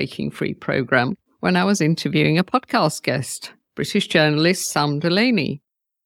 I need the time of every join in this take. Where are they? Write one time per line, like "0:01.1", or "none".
0:01.3